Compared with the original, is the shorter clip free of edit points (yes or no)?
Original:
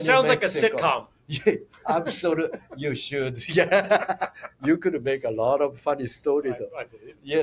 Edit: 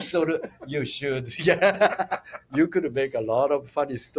yes